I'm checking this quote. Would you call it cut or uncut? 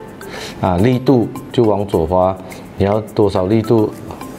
uncut